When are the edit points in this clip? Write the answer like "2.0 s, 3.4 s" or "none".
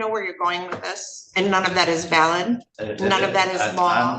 2.8 s